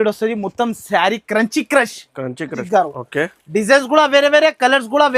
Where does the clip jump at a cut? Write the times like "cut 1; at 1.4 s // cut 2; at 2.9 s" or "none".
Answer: cut 1; at 2.6 s